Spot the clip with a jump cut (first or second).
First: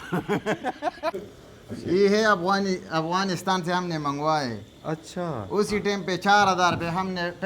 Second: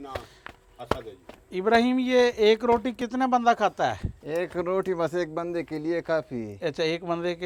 first